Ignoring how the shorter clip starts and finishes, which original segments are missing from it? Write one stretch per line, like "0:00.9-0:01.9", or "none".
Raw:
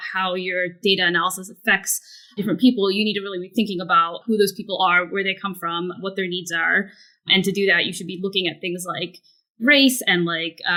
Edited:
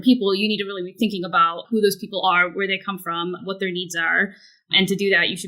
none